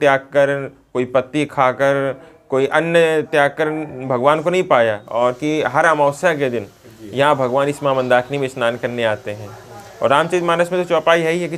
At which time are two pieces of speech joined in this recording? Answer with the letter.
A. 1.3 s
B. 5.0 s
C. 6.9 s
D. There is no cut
B